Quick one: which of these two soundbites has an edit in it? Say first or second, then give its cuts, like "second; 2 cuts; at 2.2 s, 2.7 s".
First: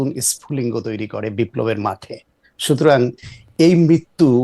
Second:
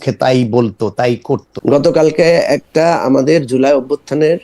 second; 1 cut; at 1.5 s